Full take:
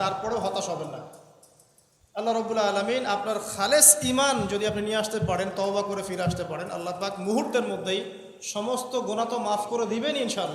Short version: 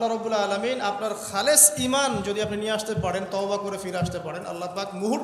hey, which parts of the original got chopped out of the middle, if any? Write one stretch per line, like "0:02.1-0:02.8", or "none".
none